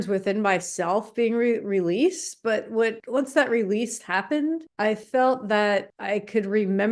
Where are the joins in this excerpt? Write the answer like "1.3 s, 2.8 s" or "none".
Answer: none